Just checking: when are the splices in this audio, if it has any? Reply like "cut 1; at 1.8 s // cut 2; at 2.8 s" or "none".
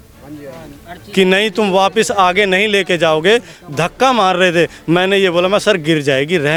none